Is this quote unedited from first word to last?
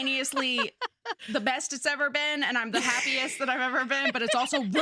no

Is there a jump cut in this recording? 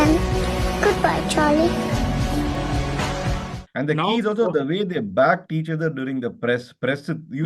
no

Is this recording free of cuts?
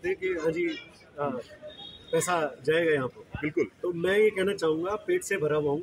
yes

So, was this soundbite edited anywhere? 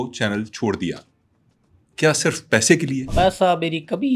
yes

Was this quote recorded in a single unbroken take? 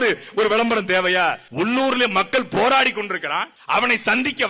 no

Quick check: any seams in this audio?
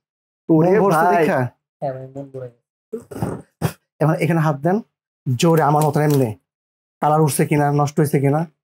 no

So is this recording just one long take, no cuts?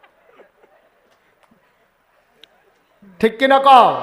yes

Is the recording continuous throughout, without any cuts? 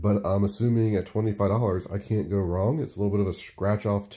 yes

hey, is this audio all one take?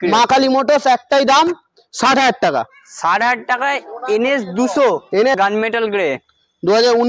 no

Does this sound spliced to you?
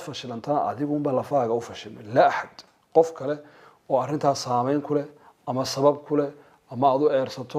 no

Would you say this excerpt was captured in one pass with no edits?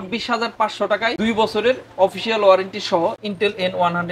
no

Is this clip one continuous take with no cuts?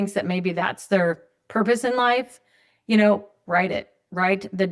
yes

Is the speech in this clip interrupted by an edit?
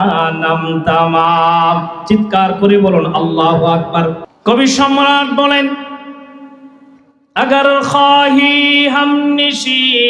yes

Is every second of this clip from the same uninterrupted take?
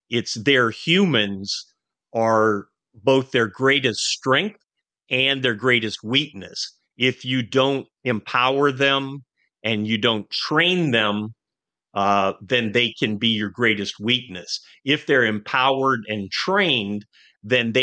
yes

